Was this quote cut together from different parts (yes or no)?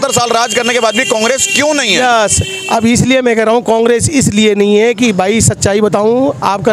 no